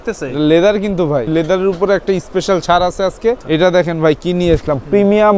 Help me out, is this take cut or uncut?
cut